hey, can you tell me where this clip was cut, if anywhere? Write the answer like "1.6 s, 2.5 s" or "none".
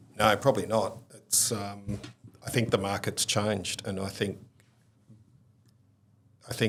none